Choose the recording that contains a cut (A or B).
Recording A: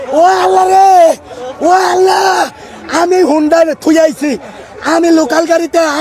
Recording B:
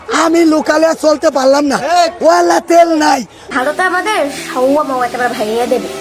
B